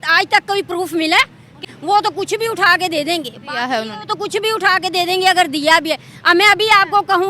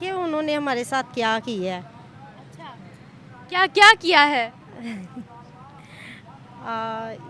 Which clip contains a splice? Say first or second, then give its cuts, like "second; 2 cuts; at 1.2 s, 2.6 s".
first; 1 cut; at 1.7 s